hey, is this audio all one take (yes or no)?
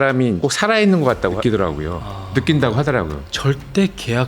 no